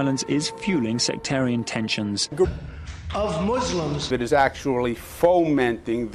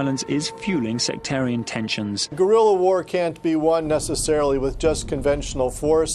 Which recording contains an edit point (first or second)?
second